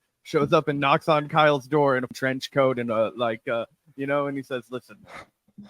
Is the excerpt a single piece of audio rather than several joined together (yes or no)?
no